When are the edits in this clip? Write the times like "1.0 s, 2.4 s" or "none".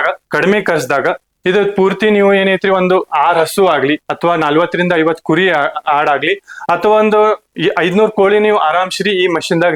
none